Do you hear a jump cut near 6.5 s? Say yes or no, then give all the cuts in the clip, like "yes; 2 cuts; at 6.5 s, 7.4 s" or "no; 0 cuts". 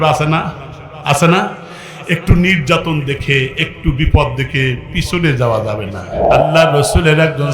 yes; 1 cut; at 6.5 s